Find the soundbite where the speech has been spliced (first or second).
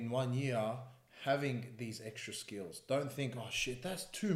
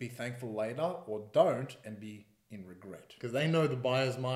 second